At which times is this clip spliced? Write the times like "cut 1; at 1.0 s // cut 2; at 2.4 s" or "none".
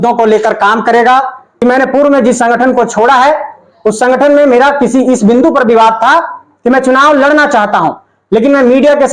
cut 1; at 1.4 s